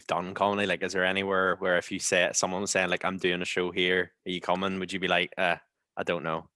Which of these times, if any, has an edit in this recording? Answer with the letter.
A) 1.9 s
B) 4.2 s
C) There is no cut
C